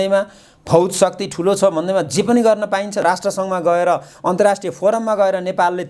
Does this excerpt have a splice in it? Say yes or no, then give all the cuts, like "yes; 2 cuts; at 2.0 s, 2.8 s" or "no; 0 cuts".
yes; 1 cut; at 3.0 s